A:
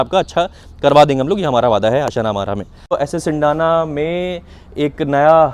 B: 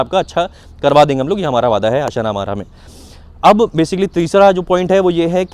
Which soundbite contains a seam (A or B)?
A